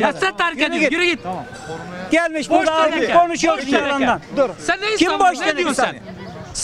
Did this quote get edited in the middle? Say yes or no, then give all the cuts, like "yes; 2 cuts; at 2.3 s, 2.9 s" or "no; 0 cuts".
no; 0 cuts